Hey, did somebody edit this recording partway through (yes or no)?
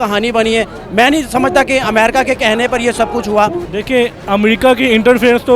yes